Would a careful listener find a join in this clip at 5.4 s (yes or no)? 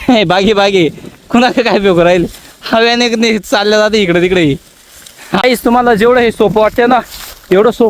yes